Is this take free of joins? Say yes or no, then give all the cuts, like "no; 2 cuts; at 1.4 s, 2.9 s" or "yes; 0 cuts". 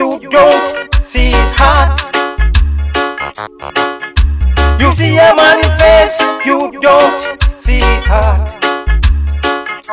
yes; 0 cuts